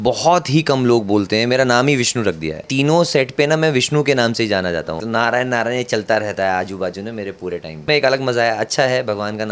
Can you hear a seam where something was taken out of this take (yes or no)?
yes